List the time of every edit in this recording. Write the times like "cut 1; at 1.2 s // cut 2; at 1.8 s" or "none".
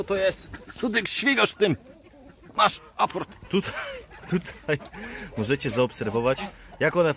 cut 1; at 3.4 s